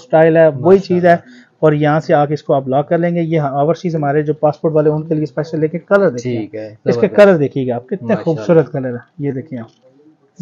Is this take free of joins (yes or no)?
yes